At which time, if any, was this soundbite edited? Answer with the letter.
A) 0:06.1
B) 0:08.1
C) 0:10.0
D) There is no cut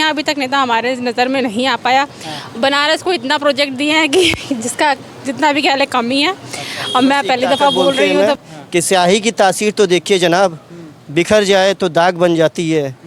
B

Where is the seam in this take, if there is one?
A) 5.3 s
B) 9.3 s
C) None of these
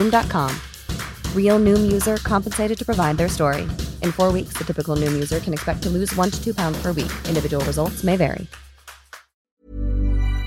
B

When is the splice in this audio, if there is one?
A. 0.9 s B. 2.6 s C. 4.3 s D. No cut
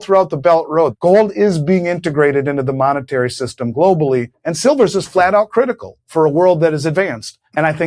A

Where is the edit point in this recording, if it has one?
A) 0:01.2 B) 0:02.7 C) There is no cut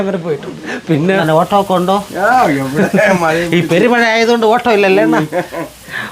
A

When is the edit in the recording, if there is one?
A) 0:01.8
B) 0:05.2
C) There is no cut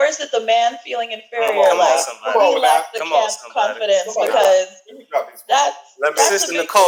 C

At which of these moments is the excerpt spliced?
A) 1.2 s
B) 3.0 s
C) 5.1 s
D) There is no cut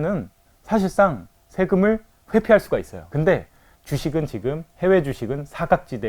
B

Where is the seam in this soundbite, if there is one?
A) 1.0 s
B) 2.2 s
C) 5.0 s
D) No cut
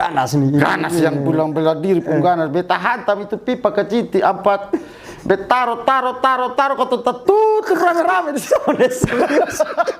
D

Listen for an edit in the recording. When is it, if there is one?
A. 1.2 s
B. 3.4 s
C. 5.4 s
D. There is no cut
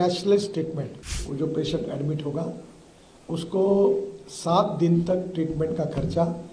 A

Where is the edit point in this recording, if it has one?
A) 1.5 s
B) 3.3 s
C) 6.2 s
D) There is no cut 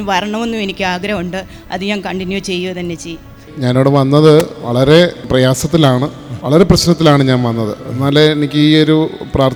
D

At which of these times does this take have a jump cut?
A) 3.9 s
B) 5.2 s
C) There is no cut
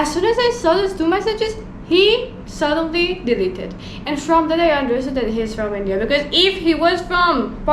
C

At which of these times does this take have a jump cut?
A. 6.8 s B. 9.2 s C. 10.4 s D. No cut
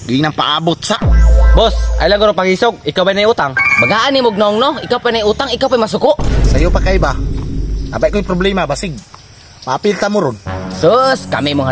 D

